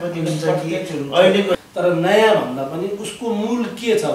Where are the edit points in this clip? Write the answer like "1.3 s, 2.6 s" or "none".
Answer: 1.6 s

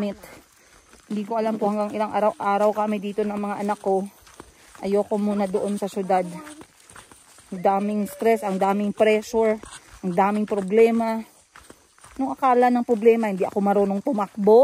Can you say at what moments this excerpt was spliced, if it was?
none

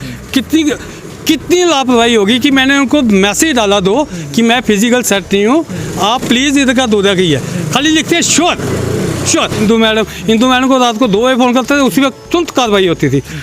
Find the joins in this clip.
9.6 s, 12.2 s

